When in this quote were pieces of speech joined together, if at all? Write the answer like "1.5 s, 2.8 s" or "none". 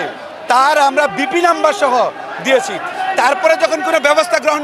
none